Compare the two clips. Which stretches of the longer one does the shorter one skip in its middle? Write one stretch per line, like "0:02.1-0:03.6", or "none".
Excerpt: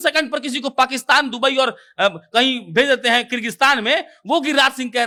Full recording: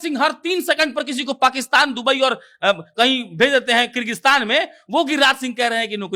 none